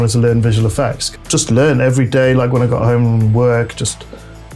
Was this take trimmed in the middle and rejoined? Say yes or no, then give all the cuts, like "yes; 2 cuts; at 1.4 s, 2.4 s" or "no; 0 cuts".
yes; 1 cut; at 1.1 s